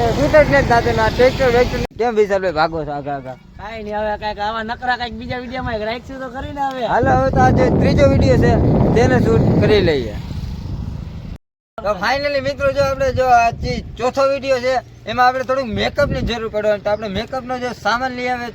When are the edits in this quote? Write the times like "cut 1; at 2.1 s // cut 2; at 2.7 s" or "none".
cut 1; at 1.8 s // cut 2; at 11.3 s